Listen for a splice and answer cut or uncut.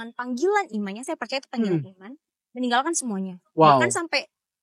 uncut